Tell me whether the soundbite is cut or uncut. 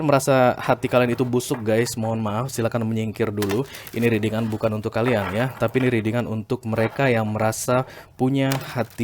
uncut